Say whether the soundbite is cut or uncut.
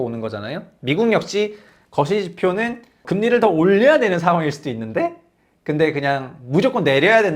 cut